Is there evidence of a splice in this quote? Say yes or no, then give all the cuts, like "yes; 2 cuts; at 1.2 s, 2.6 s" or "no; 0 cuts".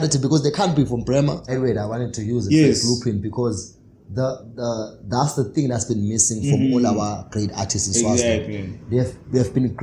yes; 1 cut; at 1.5 s